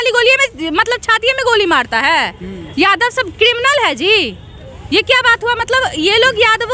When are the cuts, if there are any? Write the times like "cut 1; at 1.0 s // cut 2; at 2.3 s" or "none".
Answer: none